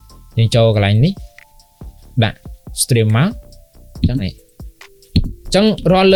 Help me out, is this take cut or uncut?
uncut